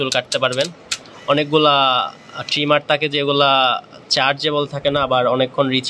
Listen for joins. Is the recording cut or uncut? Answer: cut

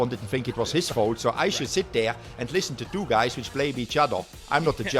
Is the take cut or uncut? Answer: uncut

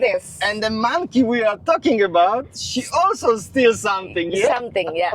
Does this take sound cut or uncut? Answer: uncut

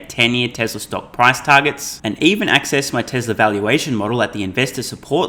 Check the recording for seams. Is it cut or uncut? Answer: uncut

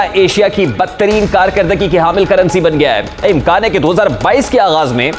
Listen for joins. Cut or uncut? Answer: cut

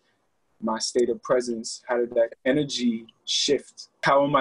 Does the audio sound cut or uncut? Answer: cut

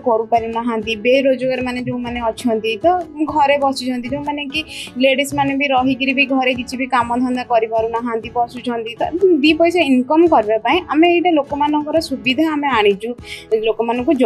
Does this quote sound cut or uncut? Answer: uncut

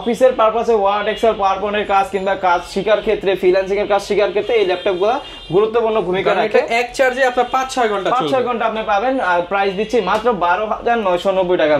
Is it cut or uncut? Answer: uncut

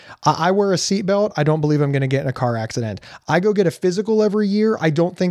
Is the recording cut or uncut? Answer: cut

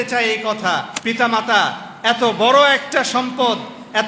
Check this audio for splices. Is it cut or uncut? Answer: cut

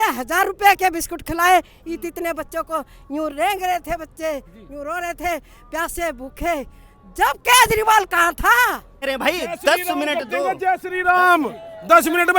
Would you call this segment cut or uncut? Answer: cut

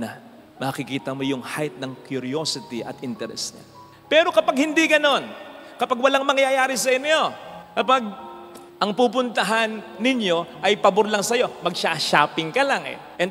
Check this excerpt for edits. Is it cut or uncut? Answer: uncut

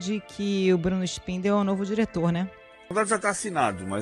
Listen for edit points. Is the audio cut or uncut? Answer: cut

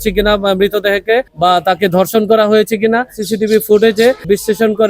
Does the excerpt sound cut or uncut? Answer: cut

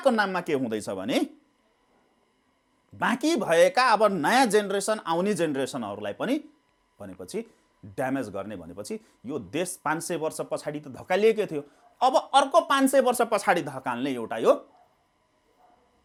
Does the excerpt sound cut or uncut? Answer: uncut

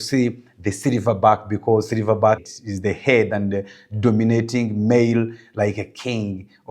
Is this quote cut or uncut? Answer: uncut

